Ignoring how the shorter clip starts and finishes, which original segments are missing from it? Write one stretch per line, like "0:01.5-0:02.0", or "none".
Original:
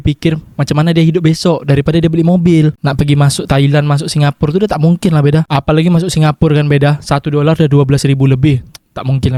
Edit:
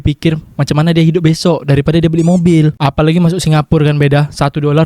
0:02.8-0:05.5